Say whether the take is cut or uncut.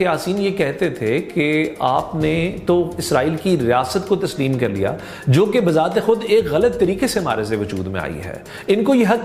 uncut